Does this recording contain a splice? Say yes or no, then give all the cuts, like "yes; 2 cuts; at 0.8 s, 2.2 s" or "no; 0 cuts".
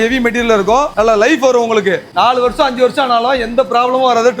no; 0 cuts